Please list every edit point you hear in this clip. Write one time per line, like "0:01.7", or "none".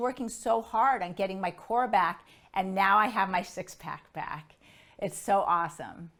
none